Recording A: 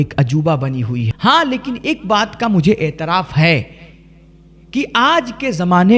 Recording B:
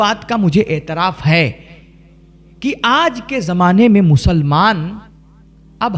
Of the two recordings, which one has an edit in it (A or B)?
A